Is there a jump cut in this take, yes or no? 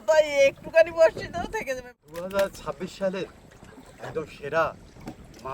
yes